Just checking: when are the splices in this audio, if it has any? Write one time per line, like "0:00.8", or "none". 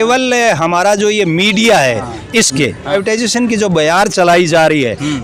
0:02.9